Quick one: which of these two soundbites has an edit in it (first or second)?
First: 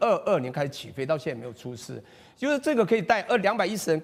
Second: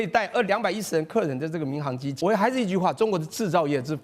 second